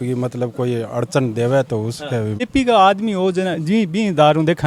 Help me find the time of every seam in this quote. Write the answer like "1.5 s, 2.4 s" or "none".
2.5 s